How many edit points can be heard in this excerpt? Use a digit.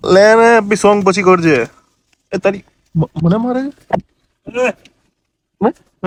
0